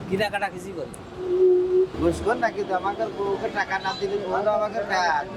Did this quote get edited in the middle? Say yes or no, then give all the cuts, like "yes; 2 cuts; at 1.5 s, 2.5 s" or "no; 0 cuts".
yes; 1 cut; at 1.9 s